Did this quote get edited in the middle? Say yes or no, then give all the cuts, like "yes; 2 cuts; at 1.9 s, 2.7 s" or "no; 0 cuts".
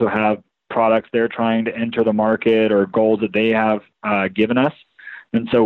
no; 0 cuts